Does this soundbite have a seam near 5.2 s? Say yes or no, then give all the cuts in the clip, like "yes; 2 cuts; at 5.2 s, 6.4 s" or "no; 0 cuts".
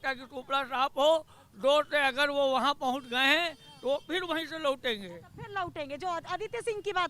no; 0 cuts